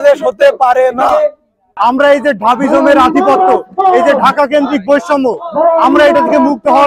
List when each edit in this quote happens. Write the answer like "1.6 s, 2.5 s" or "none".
1.6 s